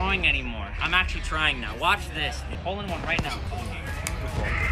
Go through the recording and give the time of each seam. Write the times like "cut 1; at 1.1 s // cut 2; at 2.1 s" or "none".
cut 1; at 2.5 s // cut 2; at 3.5 s